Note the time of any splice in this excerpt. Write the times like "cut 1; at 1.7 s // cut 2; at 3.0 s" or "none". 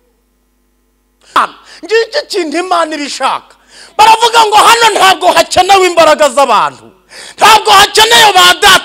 cut 1; at 1.4 s